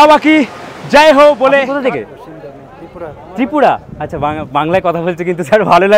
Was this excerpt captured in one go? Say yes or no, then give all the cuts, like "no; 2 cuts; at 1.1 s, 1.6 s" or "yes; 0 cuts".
no; 1 cut; at 1.7 s